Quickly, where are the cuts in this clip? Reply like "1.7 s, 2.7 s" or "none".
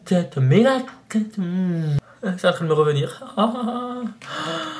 2.0 s